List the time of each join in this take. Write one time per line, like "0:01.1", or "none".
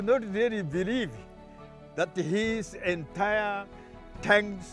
none